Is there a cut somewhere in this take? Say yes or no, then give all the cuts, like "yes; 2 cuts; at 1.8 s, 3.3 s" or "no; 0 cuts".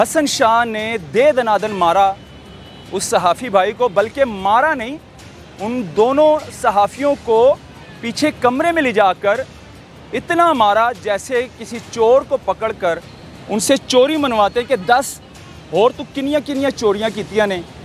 no; 0 cuts